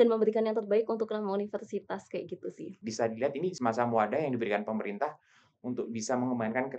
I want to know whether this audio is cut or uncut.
cut